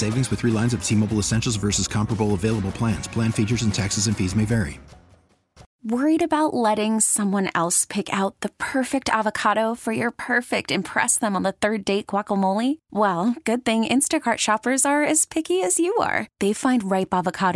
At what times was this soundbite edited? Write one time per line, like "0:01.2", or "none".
0:05.7

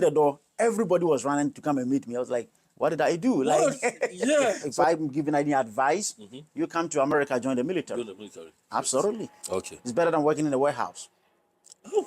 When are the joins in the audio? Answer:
0:04.7

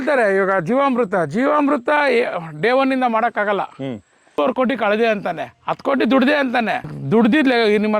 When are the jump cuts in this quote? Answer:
0:04.4
0:06.9

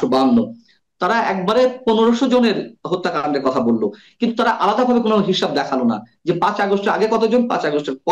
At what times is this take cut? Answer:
none

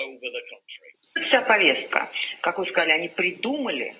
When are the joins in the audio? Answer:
0:01.1

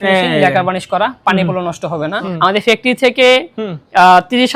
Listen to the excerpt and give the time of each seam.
0:02.2

